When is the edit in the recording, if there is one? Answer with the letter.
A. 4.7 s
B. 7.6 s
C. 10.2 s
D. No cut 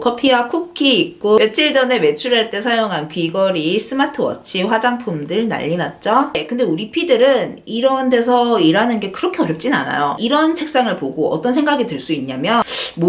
C